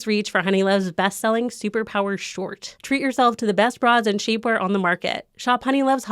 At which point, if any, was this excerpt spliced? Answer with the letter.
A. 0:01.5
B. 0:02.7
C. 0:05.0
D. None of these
B